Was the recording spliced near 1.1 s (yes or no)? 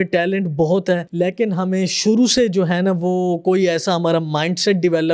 yes